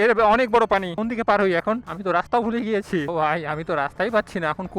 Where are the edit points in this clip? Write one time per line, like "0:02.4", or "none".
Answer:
0:00.9
0:01.9
0:03.1

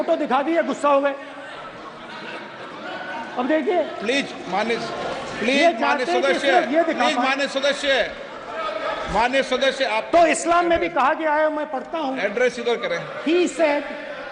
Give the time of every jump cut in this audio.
none

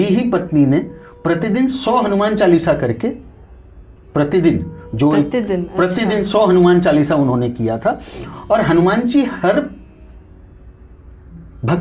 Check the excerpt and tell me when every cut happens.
none

